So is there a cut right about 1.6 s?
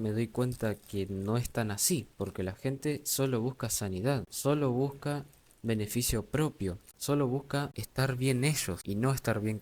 no; 4 cuts; at 4.3 s, 6.9 s, 7.8 s, 8.7 s

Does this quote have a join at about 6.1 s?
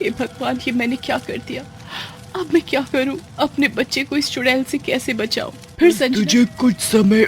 yes; 1 cut; at 6.1 s

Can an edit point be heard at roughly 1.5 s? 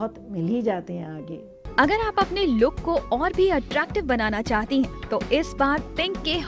yes; 1 cut; at 1.5 s

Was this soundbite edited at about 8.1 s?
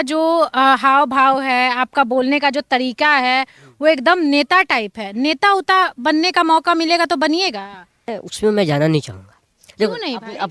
yes; 1 cut; at 8.1 s

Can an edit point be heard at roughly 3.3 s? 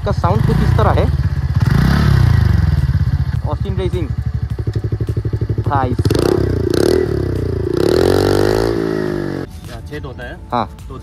yes; 2 cuts; at 3.3 s, 9.5 s

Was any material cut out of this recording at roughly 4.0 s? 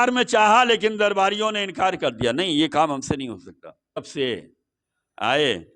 yes; 1 cut; at 4.0 s

